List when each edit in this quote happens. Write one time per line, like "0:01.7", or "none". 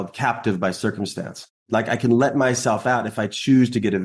0:01.7